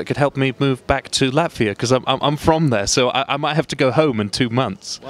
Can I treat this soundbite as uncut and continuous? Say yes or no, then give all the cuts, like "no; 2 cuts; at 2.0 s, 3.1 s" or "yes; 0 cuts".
yes; 0 cuts